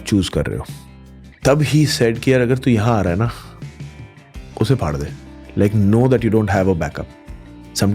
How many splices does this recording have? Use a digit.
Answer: 1